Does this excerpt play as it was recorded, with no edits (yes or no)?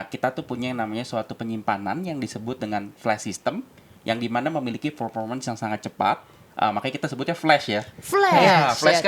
yes